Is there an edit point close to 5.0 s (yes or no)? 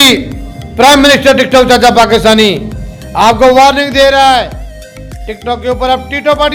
no